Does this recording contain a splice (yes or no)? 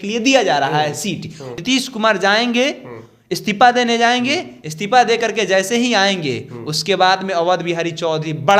yes